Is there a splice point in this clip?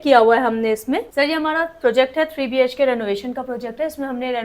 yes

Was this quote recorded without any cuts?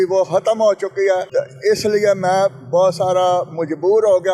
yes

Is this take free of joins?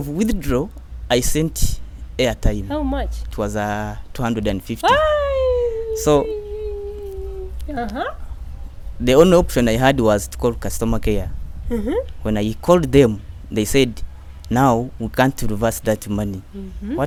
yes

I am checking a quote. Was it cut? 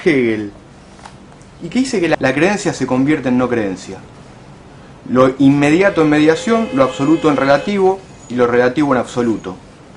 no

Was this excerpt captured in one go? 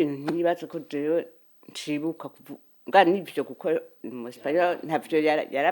yes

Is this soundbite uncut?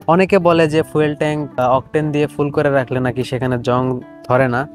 no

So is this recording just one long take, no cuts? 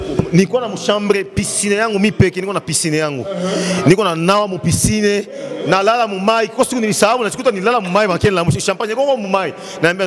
yes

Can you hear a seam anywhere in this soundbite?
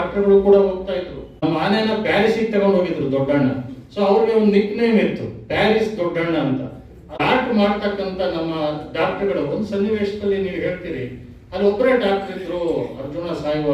yes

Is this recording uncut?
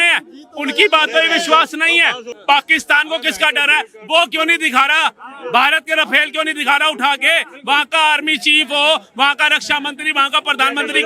no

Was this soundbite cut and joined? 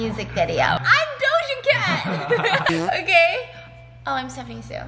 yes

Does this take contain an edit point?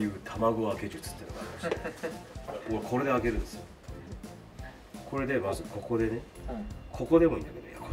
no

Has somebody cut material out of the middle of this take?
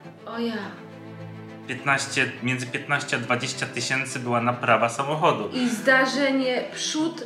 no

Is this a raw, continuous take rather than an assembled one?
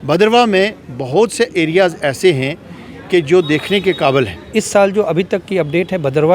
no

